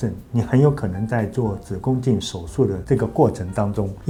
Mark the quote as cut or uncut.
uncut